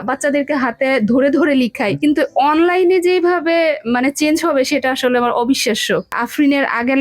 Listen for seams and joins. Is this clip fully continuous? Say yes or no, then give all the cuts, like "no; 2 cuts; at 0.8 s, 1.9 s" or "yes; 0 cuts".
no; 2 cuts; at 2.0 s, 6.1 s